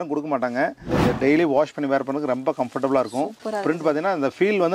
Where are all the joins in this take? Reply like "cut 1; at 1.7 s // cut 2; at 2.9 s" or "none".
cut 1; at 0.8 s // cut 2; at 3.4 s